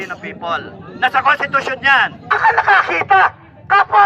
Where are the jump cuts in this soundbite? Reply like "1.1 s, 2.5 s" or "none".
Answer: 2.4 s